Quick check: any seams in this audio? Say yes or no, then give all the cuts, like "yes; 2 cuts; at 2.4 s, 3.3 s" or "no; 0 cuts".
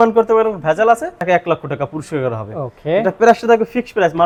no; 0 cuts